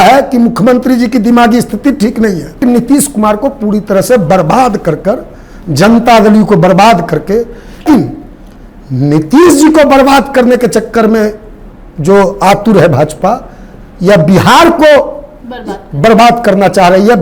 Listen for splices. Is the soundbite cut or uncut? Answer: cut